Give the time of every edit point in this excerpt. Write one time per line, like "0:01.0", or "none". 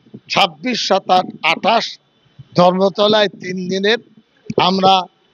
none